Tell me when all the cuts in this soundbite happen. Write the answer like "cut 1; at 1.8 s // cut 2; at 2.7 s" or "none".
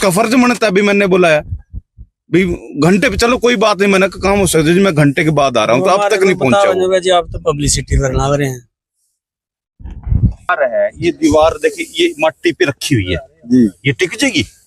cut 1; at 10.5 s